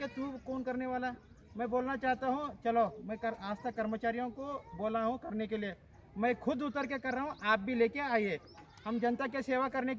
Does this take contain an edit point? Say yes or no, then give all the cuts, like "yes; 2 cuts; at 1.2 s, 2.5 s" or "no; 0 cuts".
no; 0 cuts